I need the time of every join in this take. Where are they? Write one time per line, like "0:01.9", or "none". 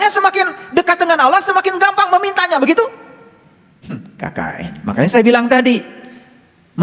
0:04.8